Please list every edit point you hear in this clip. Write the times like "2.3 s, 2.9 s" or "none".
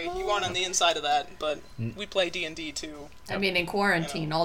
none